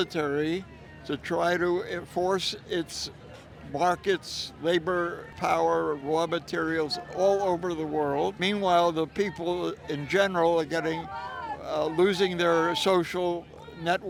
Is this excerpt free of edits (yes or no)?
yes